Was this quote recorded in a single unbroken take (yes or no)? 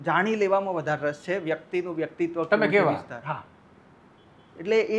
yes